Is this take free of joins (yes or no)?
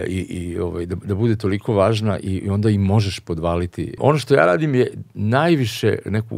no